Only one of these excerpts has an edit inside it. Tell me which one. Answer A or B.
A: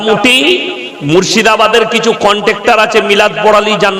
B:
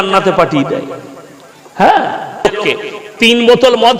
B